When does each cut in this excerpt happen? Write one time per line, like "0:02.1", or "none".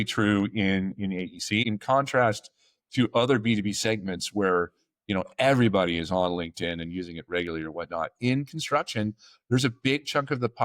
0:01.6